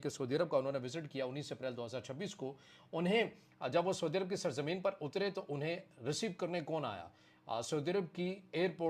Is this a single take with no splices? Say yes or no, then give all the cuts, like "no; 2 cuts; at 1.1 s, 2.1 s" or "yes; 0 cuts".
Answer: yes; 0 cuts